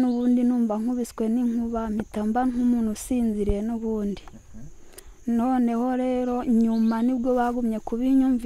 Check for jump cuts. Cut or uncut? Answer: uncut